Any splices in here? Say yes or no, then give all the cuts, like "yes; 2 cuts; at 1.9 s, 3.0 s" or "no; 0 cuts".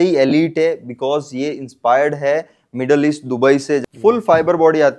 yes; 1 cut; at 3.8 s